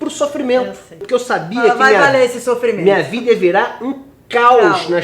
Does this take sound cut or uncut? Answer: cut